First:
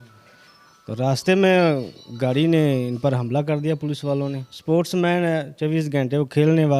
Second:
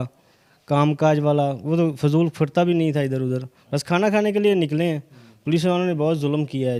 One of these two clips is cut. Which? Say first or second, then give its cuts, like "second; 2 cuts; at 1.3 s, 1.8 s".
first; 1 cut; at 4.5 s